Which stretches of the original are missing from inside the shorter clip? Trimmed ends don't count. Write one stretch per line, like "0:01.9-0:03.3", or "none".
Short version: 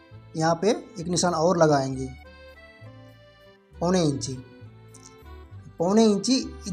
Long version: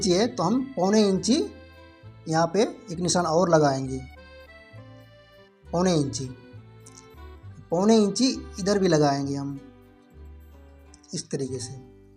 none